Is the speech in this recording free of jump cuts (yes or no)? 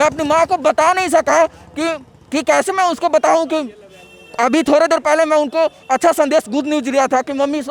yes